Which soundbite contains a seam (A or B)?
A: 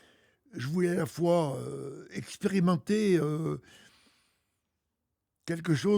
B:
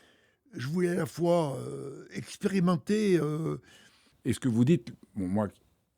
B